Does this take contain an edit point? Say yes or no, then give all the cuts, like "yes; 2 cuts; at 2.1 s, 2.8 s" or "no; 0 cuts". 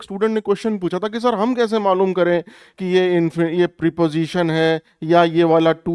no; 0 cuts